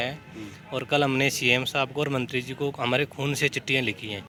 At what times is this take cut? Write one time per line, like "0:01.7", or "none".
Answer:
none